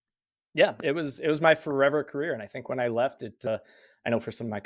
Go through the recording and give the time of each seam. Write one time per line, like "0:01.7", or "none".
0:03.5